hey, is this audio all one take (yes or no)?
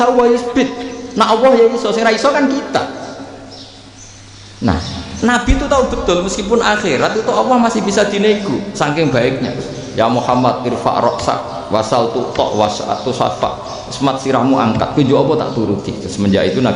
no